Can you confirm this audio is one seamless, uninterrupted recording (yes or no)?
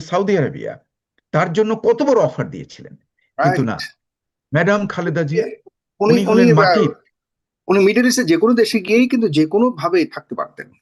yes